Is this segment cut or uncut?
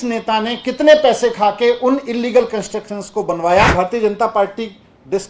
cut